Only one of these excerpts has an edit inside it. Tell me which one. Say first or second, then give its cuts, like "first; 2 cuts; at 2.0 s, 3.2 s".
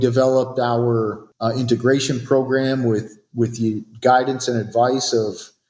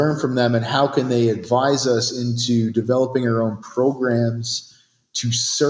first; 1 cut; at 1.3 s